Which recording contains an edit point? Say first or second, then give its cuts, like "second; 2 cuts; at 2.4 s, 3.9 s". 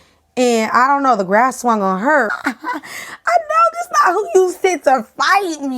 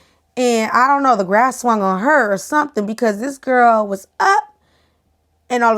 first; 1 cut; at 2.3 s